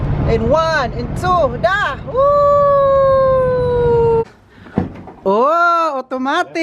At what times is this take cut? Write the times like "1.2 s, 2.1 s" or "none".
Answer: 4.2 s

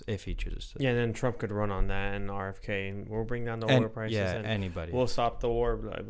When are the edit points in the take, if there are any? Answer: none

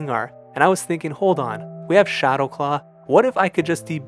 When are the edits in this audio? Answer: none

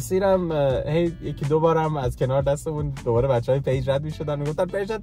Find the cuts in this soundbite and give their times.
none

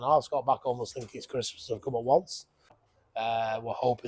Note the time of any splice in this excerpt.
2.8 s

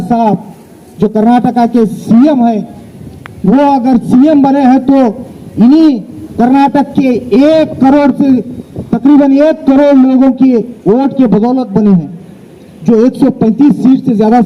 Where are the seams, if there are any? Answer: none

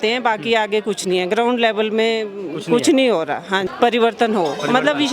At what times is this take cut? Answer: 3.7 s

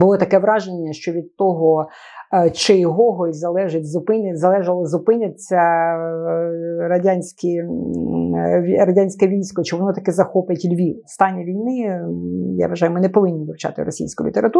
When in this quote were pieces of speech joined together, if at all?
11.1 s

